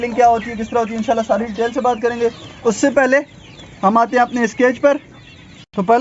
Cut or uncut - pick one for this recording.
uncut